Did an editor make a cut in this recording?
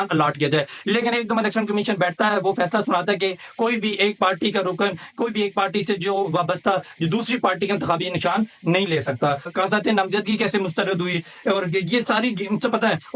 yes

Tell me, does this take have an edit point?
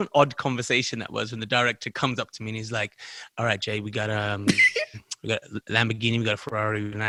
no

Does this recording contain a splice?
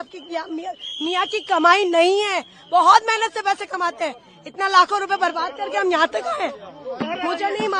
no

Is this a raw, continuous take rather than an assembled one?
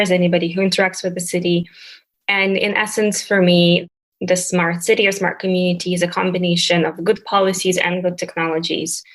no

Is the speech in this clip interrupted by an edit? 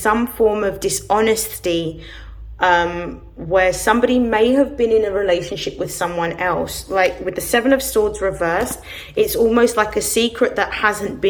no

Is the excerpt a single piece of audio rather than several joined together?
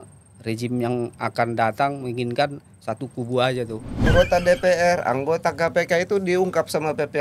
no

